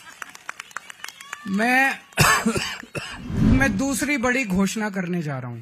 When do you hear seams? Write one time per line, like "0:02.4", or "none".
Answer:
0:03.5